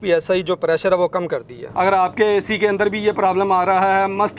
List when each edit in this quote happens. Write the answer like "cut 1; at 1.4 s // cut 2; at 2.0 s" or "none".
cut 1; at 1.6 s